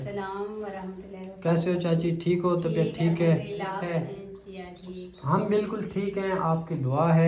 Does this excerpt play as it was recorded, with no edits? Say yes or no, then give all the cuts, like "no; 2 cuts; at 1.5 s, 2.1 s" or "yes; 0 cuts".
no; 1 cut; at 3.8 s